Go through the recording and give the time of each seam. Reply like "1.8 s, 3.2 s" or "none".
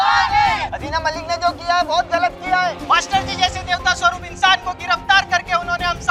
none